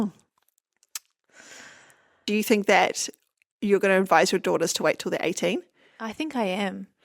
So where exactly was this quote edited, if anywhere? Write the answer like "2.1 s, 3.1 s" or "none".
2.3 s